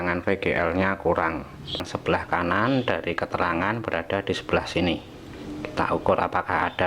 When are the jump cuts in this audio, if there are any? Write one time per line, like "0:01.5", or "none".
0:01.9